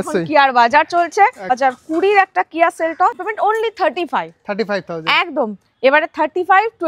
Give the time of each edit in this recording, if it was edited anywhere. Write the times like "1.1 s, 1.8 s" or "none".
1.6 s, 3.2 s